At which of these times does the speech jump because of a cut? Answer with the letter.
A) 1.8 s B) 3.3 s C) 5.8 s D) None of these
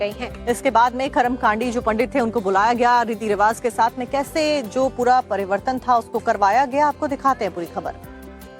B